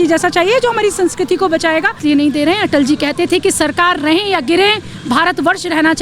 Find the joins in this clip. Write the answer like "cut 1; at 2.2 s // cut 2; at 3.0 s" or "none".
cut 1; at 2.0 s